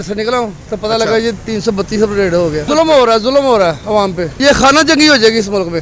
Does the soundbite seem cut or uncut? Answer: uncut